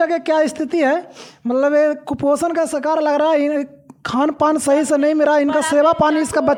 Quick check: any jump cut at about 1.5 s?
no; 0 cuts

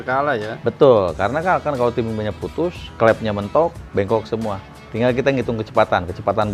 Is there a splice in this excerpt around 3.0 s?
no; 0 cuts

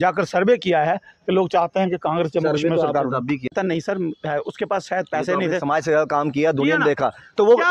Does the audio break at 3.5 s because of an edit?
yes; 1 cut; at 3.5 s

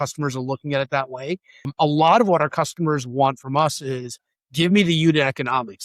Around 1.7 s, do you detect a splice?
yes; 1 cut; at 1.7 s

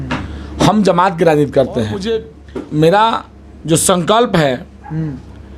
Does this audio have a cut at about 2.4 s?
yes; 1 cut; at 2.4 s

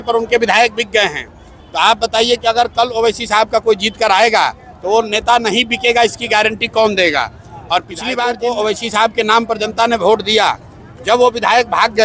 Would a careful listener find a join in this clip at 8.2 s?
yes; 1 cut; at 8.2 s

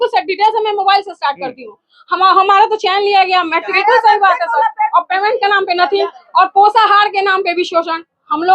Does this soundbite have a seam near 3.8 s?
yes; 1 cut; at 3.8 s

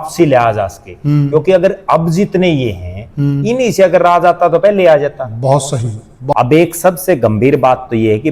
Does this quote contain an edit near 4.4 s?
no; 1 cut; at 6.3 s

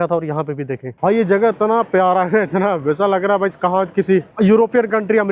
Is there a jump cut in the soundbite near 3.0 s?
no; 2 cuts; at 0.9 s, 4.3 s

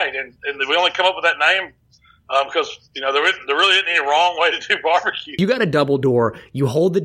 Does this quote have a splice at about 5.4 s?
yes; 1 cut; at 5.4 s

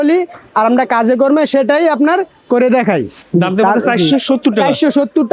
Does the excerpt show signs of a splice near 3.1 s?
no; 0 cuts

